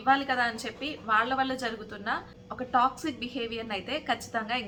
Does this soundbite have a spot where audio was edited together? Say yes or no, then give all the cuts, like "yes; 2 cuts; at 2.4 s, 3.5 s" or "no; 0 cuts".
no; 0 cuts